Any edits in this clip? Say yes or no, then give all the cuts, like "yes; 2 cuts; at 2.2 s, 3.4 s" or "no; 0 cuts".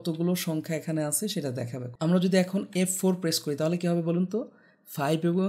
yes; 1 cut; at 1.8 s